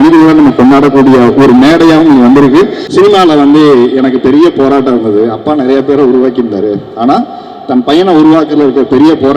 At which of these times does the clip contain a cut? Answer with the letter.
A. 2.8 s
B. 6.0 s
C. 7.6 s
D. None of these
A